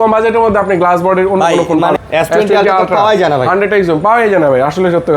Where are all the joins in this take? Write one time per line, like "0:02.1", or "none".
0:02.0